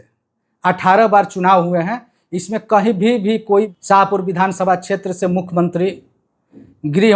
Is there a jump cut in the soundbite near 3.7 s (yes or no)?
yes